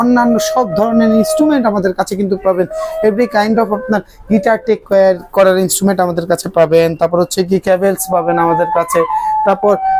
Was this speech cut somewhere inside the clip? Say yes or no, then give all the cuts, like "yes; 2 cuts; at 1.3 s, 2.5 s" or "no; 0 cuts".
no; 0 cuts